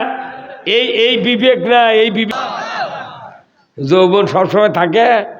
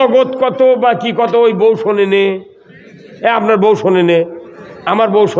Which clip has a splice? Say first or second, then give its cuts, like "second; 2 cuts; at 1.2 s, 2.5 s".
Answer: first; 1 cut; at 2.3 s